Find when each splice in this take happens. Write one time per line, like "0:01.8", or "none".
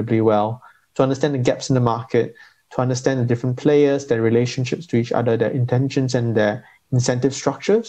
none